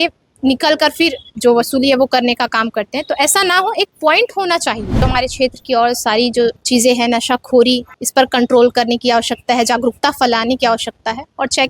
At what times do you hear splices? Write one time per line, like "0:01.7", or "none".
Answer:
0:01.3
0:05.0
0:06.6
0:07.9